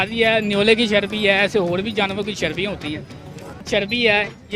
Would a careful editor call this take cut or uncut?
cut